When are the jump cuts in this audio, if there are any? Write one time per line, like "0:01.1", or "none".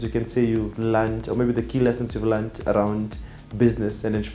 none